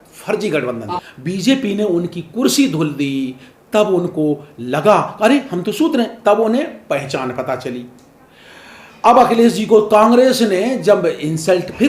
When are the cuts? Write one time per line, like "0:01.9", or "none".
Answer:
0:00.9